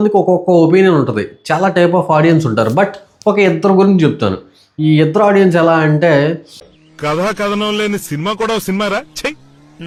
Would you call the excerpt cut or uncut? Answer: uncut